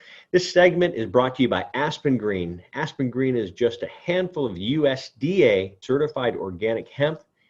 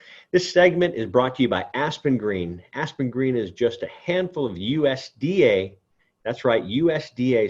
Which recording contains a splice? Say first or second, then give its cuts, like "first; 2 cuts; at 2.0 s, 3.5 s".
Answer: first; 1 cut; at 5.8 s